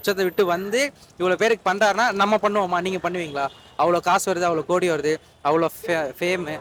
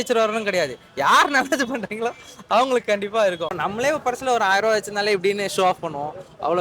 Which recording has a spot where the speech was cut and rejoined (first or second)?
second